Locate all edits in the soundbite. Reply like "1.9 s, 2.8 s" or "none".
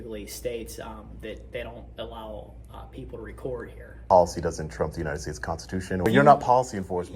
4.0 s, 6.0 s